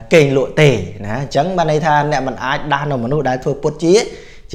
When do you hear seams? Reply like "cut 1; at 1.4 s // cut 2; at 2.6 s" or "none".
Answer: none